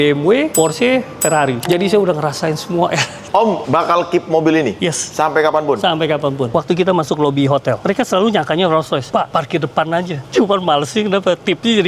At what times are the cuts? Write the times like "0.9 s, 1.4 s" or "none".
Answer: 1.6 s, 3.1 s, 6.5 s, 7.8 s, 10.2 s